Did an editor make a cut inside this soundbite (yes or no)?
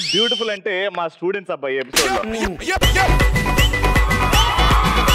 no